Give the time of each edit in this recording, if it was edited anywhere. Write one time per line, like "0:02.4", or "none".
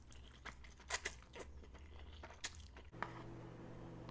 0:02.9